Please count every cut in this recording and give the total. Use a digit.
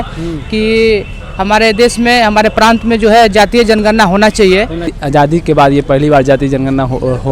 1